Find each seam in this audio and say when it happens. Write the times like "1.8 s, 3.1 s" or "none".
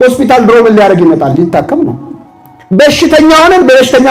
none